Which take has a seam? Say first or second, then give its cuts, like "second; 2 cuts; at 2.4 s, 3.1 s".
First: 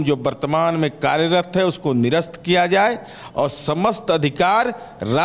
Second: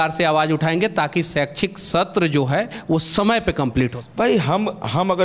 second; 1 cut; at 4.0 s